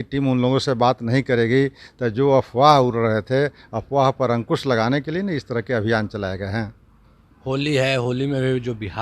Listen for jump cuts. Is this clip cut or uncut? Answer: uncut